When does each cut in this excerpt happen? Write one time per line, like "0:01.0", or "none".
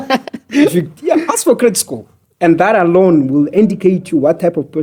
none